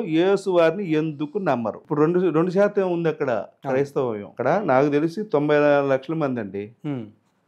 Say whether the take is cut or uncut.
uncut